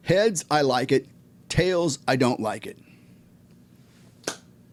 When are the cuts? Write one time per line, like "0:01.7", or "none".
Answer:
none